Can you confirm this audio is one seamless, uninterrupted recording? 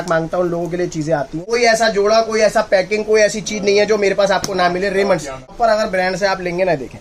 no; 2 cuts; at 1.4 s, 5.5 s

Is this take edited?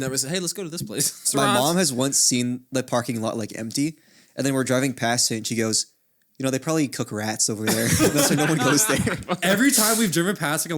yes; 2 cuts; at 1.3 s, 9.3 s

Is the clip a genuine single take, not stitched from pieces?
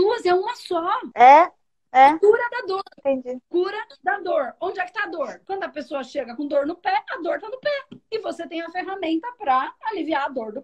no; 2 cuts; at 1.0 s, 5.4 s

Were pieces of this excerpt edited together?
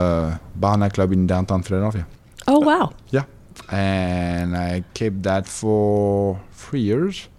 no; 0 cuts

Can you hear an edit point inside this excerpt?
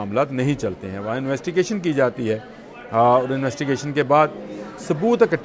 no; 0 cuts

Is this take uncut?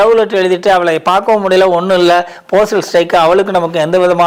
yes; 0 cuts

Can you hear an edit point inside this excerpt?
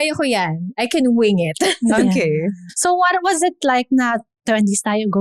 yes; 1 cut; at 2.7 s

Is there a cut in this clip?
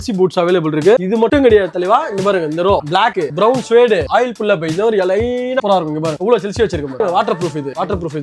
yes; 2 cuts; at 5.6 s, 7.0 s

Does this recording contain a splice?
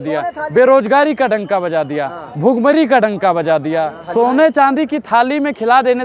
yes; 1 cut; at 4.0 s

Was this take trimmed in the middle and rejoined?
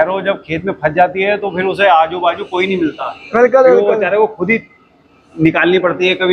no; 0 cuts

